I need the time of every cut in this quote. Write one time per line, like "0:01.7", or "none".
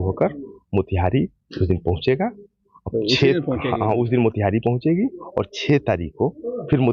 none